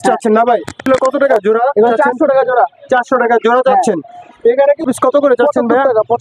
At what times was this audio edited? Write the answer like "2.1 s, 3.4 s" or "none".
0.8 s, 4.0 s, 4.8 s